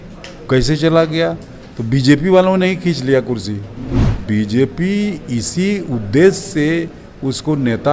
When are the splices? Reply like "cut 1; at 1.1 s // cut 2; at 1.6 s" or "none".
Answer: cut 1; at 4.1 s